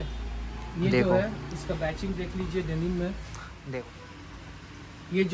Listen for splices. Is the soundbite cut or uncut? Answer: cut